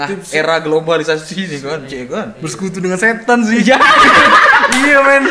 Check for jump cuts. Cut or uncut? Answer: uncut